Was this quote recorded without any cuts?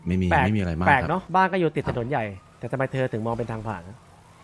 no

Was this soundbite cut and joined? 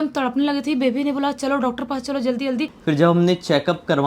yes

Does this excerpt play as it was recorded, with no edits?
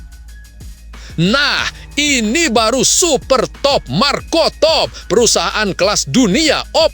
no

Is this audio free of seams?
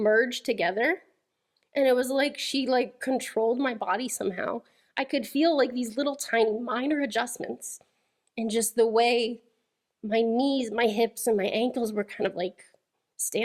yes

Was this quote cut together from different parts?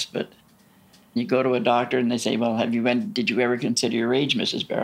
yes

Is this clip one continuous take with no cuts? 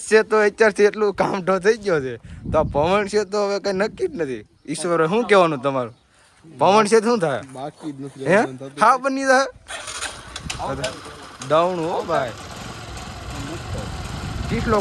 yes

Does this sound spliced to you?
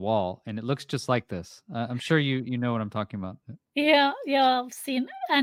no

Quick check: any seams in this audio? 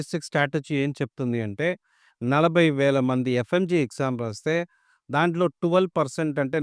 no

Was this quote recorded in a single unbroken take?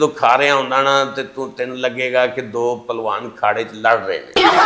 yes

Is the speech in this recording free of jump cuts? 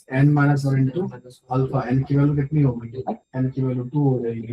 no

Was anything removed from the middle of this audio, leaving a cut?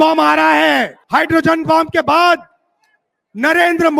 yes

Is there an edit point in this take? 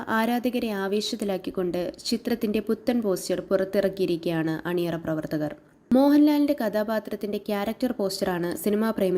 yes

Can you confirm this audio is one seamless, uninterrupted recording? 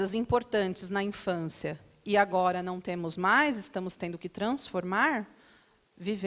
yes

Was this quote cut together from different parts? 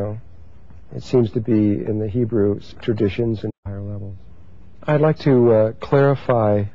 no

